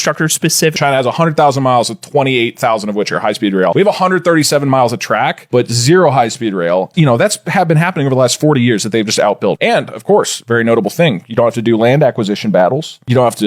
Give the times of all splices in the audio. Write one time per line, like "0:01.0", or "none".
0:00.8
0:03.7
0:06.9
0:09.6

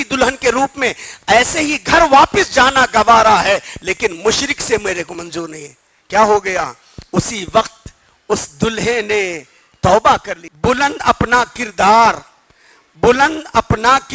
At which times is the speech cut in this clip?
0:10.4

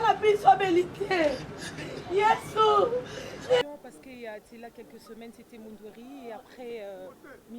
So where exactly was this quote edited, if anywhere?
0:03.6

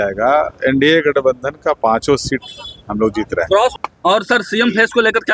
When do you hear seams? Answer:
0:03.7

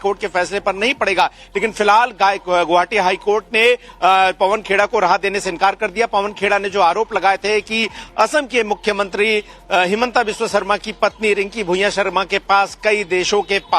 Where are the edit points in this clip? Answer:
none

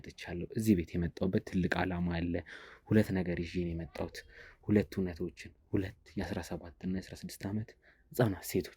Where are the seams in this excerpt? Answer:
none

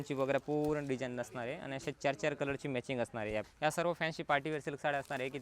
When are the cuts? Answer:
0:03.5

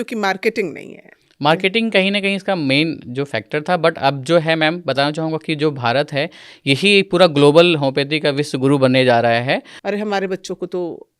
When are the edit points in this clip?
0:09.7

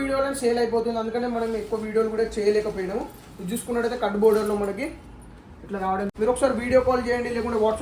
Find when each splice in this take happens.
0:06.1

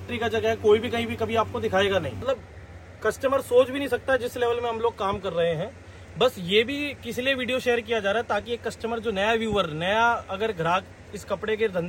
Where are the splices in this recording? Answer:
0:02.2

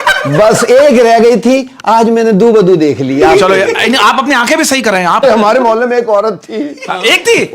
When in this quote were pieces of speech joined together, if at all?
0:05.2

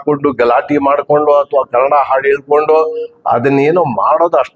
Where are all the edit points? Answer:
none

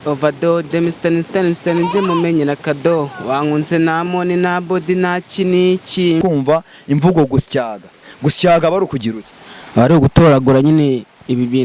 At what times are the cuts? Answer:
0:06.2

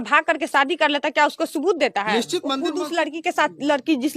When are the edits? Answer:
0:02.5

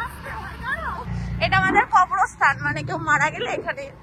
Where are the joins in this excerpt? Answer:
0:01.1

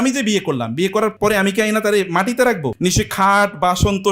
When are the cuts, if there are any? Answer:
0:01.2
0:02.7

